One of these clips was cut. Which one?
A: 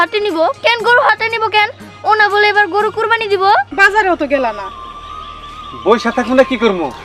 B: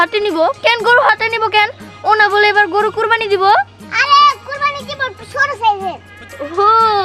A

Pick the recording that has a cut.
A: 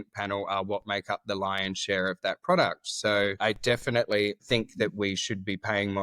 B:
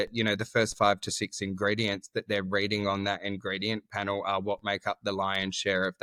A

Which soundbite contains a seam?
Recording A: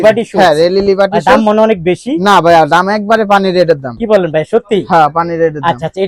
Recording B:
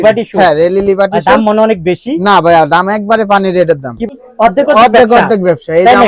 B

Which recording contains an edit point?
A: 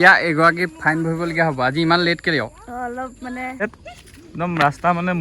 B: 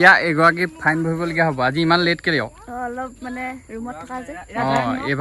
A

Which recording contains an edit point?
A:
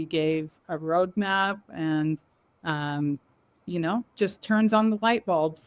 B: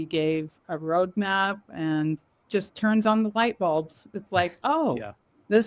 B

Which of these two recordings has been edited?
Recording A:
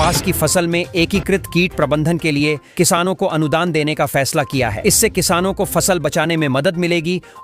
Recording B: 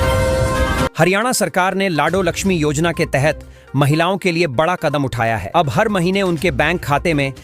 B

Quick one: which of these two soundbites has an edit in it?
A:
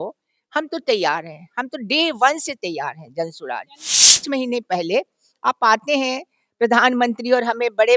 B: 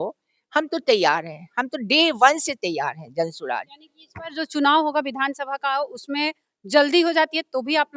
A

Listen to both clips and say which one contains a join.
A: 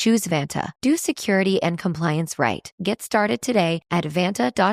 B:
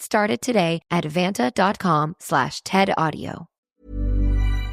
B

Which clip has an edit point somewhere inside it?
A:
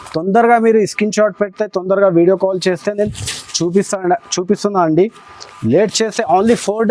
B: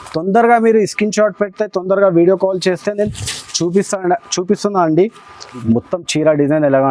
B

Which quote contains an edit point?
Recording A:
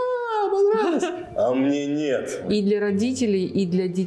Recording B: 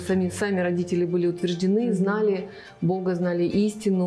A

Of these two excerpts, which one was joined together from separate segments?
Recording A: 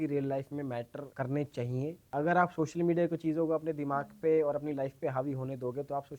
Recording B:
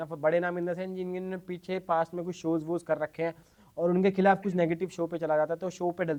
A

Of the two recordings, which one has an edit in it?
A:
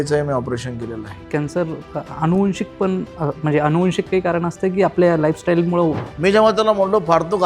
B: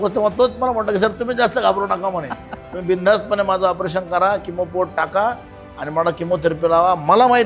A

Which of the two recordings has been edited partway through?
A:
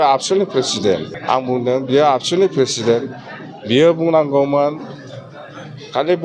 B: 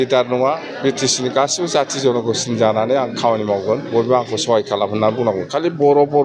A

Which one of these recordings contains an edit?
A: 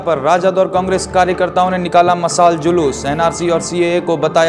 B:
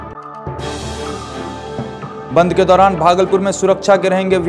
B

